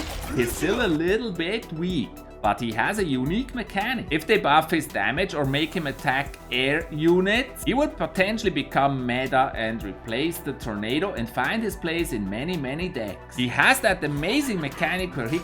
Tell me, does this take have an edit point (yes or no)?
yes